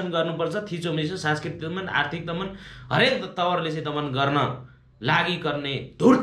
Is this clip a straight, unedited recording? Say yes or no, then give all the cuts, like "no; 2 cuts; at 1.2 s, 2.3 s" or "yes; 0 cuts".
yes; 0 cuts